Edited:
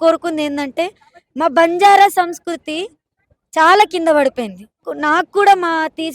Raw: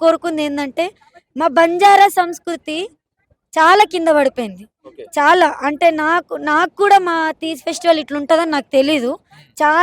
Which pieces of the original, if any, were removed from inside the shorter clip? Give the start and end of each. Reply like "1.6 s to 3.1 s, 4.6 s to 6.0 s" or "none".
4.9 s to 6.3 s